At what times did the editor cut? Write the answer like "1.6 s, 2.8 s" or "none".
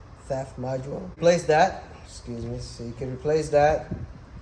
1.2 s